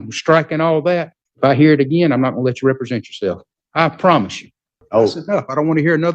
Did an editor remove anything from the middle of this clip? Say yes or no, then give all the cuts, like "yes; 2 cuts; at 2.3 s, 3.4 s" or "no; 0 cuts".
yes; 3 cuts; at 1.2 s, 3.5 s, 4.7 s